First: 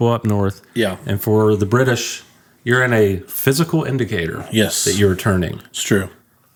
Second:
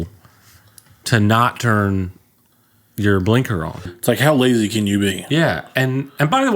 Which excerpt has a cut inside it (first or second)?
second